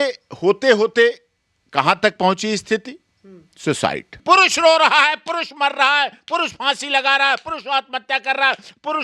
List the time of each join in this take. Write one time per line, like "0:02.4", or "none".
0:04.1